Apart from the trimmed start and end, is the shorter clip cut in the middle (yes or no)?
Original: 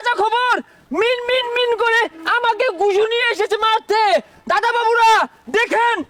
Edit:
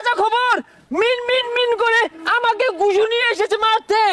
no